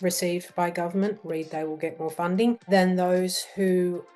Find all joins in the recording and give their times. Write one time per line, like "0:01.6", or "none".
0:02.6

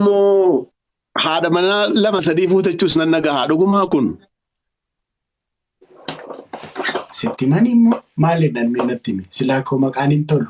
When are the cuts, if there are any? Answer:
none

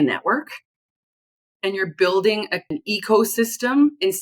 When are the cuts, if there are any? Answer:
0:02.7

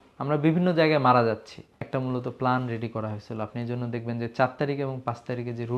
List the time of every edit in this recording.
0:01.7

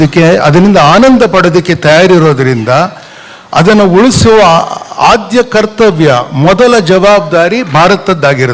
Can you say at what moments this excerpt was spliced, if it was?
none

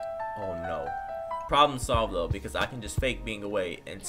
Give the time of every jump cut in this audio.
0:01.5

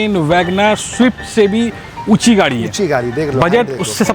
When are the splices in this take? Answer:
none

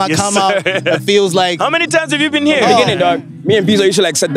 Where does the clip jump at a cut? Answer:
0:02.8

